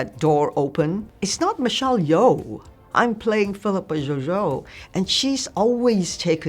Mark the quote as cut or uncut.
cut